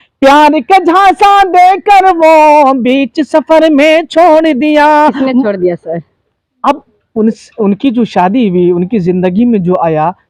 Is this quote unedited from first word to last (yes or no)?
yes